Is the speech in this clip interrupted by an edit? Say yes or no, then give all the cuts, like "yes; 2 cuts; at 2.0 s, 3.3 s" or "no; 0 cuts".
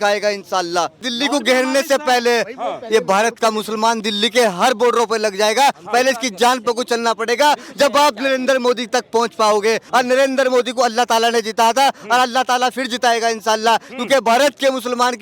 yes; 2 cuts; at 1.1 s, 9.8 s